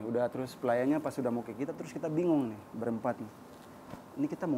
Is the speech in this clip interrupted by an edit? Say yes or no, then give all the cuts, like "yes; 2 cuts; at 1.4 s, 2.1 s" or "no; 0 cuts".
no; 0 cuts